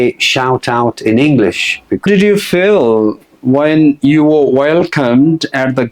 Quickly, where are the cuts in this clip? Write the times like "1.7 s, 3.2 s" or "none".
2.1 s